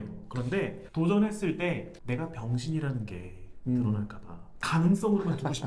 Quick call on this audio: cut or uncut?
uncut